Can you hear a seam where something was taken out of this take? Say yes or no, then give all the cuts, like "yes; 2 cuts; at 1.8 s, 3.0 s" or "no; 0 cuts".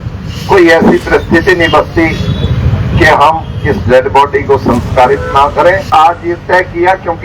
yes; 1 cut; at 5.9 s